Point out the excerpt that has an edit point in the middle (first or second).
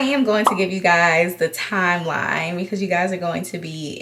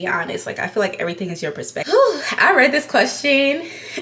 second